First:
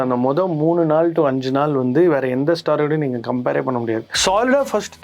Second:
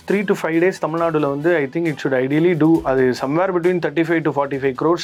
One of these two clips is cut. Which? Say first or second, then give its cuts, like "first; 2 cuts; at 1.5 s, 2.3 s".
first; 1 cut; at 4.0 s